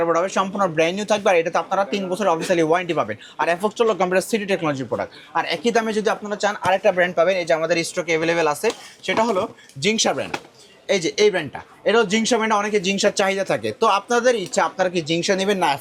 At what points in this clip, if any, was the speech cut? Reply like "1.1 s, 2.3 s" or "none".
none